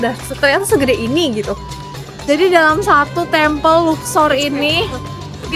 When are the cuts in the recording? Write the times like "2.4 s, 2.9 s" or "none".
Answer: 2.0 s